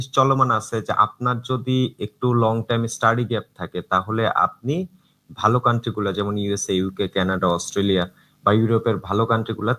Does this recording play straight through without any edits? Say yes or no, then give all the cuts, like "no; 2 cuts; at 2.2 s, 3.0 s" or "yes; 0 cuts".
yes; 0 cuts